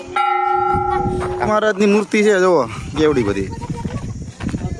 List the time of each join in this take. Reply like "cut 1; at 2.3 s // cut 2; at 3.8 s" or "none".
cut 1; at 1.5 s

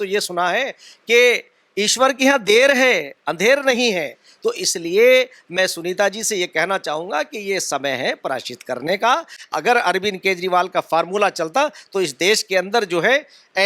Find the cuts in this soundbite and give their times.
cut 1; at 9.4 s

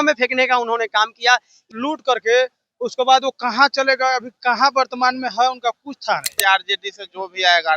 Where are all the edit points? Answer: cut 1; at 1.7 s // cut 2; at 6.4 s

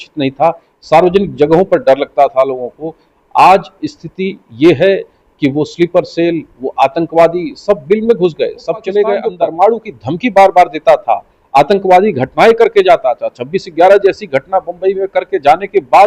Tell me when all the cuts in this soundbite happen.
cut 1; at 9.3 s

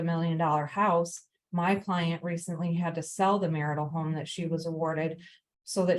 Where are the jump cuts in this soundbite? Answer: none

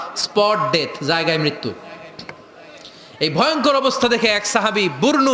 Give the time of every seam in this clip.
none

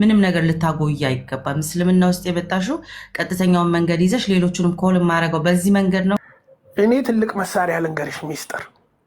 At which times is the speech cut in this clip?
cut 1; at 6.2 s

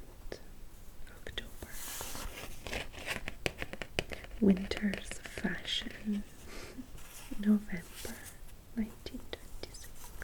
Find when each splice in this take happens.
none

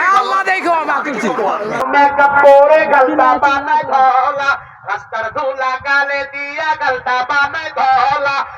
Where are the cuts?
cut 1; at 1.9 s

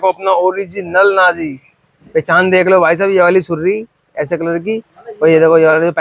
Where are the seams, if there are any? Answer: none

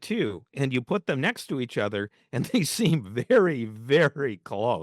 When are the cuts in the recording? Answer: none

